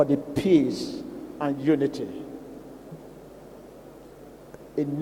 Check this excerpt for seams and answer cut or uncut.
uncut